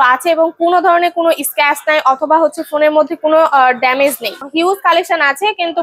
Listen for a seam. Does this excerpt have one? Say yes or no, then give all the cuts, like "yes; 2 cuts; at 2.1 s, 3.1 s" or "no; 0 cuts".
yes; 1 cut; at 4.4 s